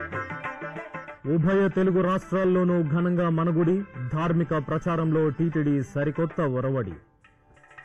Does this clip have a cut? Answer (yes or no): yes